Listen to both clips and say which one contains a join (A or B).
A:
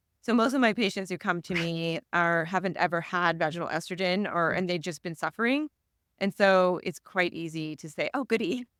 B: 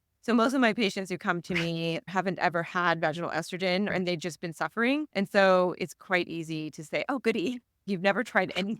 B